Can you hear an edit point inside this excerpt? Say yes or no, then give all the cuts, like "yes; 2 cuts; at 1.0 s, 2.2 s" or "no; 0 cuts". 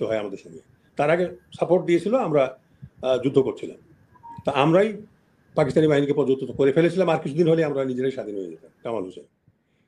yes; 1 cut; at 8.8 s